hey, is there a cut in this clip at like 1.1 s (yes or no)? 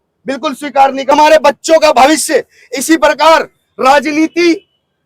yes